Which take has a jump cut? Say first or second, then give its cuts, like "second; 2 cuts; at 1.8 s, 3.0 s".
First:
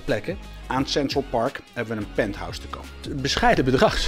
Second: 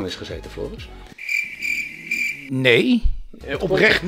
first; 1 cut; at 3.1 s